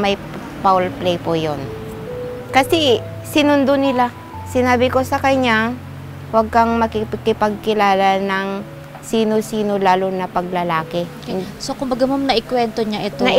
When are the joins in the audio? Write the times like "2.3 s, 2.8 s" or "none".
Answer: none

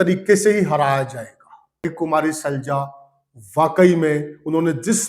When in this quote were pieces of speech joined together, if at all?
1.9 s

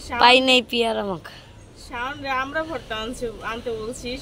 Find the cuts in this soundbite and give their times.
none

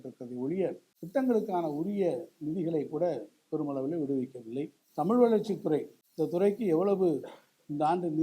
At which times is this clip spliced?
0.9 s, 4.8 s, 6.0 s

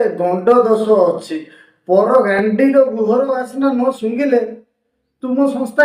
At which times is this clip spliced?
4.5 s

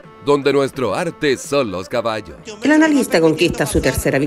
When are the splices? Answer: 2.2 s

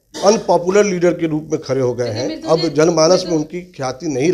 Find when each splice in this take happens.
none

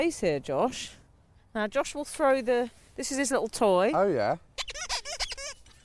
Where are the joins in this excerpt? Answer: 1.4 s

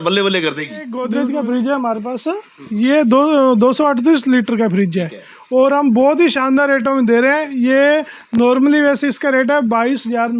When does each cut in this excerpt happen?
1.0 s

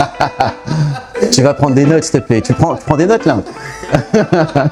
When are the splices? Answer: none

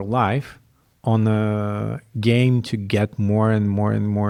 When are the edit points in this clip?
none

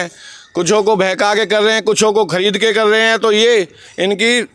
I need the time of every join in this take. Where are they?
none

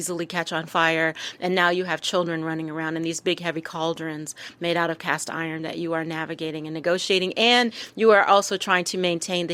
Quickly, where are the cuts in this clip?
none

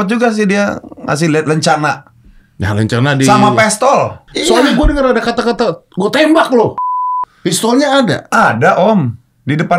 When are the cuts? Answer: 4.3 s, 6.8 s

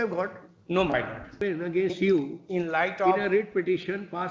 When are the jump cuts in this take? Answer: 1.4 s

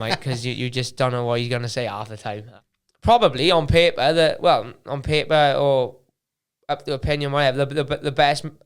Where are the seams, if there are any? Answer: 2.5 s

